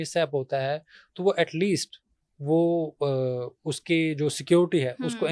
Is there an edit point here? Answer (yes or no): no